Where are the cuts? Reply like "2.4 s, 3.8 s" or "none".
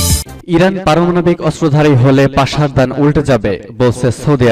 none